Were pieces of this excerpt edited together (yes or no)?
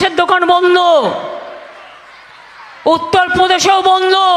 no